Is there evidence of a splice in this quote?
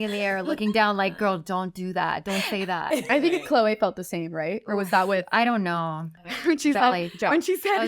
yes; 1 cut; at 6.1 s

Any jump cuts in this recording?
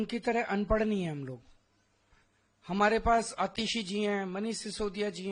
no; 0 cuts

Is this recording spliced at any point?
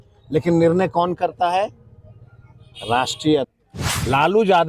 yes; 1 cut; at 3.5 s

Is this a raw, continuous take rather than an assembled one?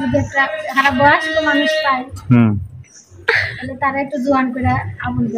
yes; 0 cuts

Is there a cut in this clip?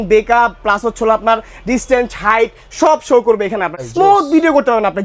yes; 1 cut; at 3.7 s

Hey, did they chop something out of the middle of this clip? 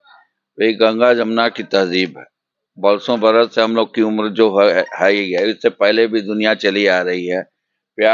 no; 0 cuts

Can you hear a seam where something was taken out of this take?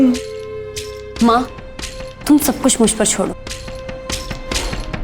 yes; 1 cut; at 3.4 s

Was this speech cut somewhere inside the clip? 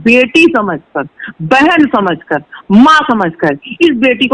no; 0 cuts

